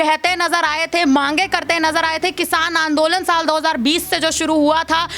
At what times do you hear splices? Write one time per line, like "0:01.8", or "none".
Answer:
none